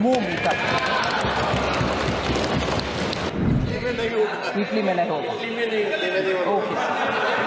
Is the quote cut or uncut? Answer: cut